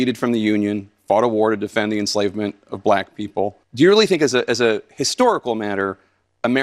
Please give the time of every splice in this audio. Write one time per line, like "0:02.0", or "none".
0:03.6